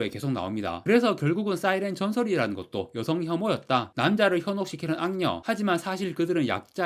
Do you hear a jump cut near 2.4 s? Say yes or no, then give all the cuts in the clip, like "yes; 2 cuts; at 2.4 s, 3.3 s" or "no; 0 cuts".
no; 2 cuts; at 0.8 s, 3.9 s